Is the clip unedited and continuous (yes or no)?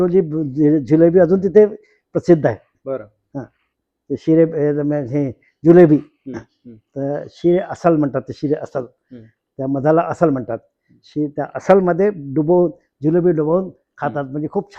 yes